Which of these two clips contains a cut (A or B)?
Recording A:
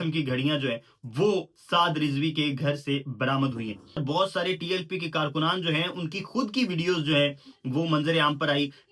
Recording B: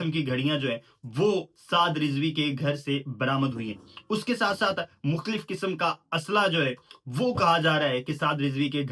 A